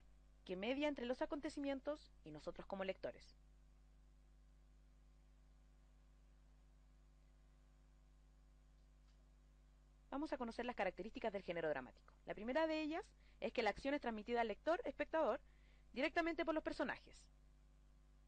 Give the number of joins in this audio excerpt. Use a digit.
1